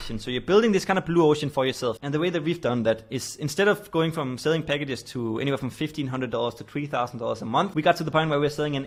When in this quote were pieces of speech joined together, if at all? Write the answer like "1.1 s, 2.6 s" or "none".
none